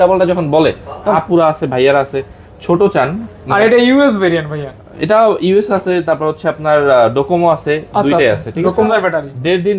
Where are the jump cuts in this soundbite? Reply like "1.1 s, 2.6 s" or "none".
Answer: 1.1 s, 8.9 s